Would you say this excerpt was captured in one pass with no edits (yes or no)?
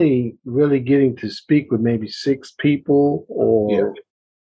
yes